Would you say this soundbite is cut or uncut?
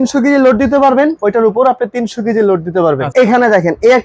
cut